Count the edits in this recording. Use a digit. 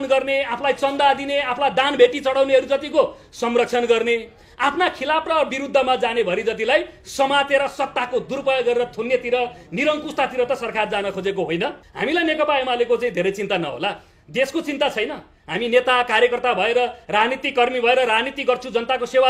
1